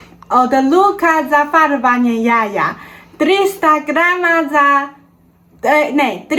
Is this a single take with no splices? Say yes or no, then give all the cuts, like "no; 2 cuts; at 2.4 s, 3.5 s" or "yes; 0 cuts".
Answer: yes; 0 cuts